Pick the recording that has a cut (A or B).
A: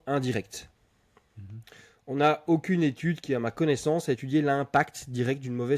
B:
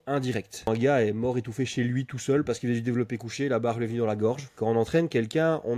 B